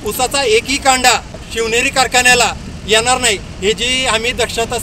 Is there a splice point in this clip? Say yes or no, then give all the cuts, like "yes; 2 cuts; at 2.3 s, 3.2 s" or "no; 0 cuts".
yes; 1 cut; at 1.5 s